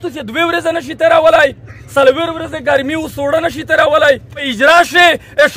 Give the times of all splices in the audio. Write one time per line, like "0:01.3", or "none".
0:04.5